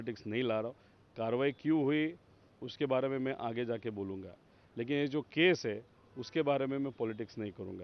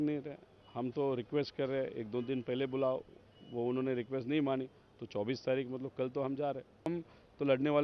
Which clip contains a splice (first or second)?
second